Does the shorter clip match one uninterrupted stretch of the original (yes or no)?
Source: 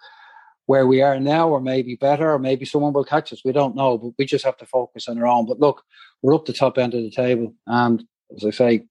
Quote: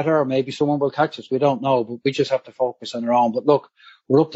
yes